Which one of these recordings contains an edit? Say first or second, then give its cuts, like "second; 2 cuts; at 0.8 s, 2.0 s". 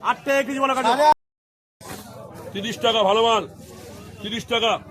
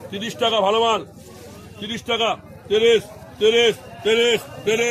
first; 1 cut; at 1.1 s